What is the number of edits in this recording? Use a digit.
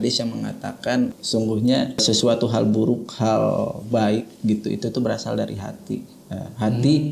2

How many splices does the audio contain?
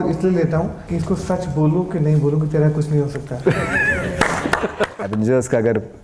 2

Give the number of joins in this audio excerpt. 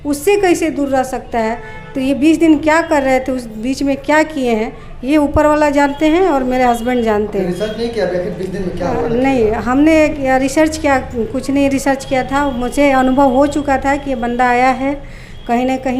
0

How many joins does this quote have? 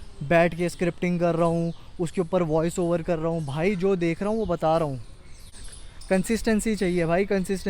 1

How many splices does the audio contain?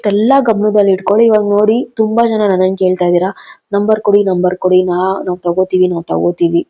0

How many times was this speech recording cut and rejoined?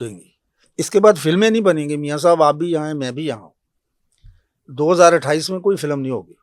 0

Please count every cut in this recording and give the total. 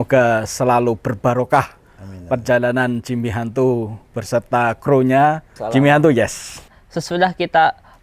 2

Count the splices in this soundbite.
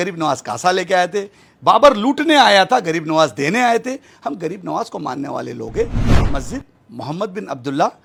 0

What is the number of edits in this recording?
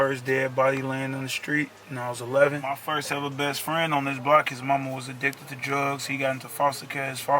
1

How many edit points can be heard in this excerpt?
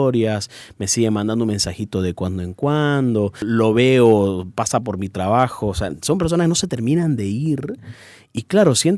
1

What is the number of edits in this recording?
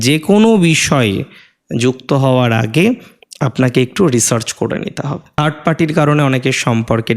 1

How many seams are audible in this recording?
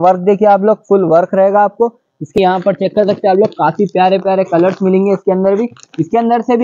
1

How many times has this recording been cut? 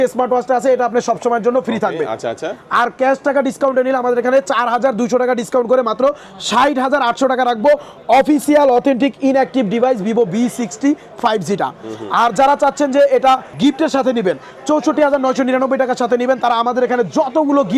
0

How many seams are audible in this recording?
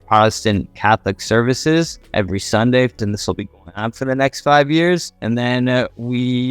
3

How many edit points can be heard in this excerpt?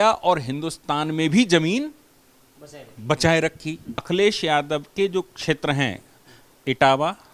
1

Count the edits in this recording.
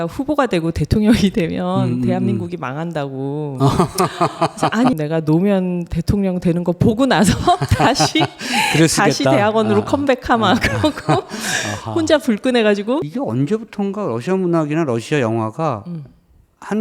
2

